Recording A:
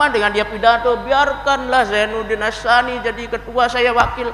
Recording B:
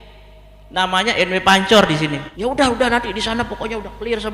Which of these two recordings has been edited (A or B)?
B